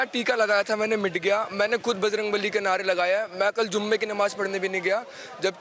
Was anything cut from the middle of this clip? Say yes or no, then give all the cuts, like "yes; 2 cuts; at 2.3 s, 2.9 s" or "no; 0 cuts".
no; 0 cuts